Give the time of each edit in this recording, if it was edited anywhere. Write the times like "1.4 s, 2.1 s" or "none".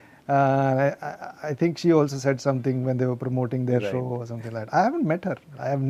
none